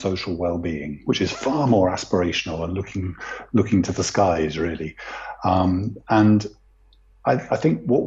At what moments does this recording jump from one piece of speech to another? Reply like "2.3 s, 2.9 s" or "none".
none

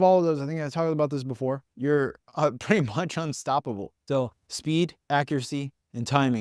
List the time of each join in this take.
1.7 s, 3.9 s

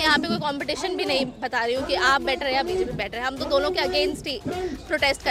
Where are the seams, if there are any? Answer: none

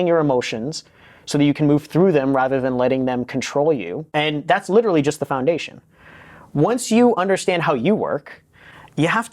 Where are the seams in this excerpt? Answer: 4.0 s

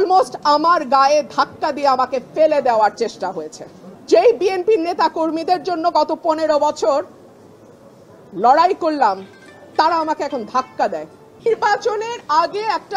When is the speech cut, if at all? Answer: 11.3 s

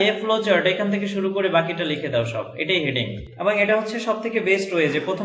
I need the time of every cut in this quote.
3.2 s

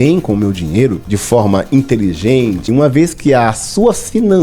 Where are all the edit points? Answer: 1.1 s, 2.7 s

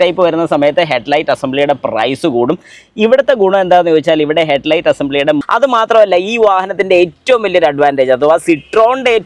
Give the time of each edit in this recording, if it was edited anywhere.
5.4 s

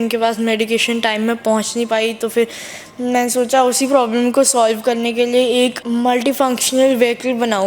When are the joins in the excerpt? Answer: 5.8 s

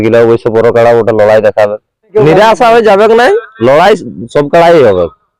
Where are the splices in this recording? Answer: 2.1 s

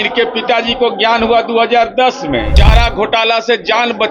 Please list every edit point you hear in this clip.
2.6 s

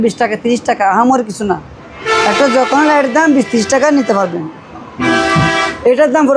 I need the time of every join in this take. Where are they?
none

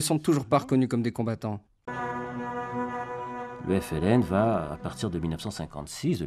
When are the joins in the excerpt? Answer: 1.9 s

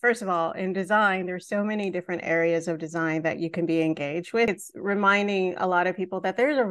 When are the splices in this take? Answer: 4.5 s

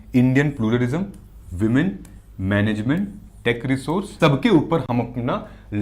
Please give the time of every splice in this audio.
4.2 s

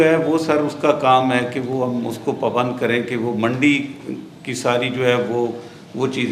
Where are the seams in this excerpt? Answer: none

